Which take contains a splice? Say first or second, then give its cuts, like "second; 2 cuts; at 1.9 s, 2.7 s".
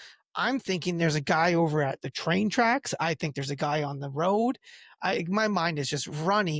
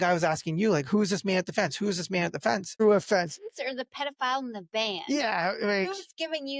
second; 1 cut; at 2.8 s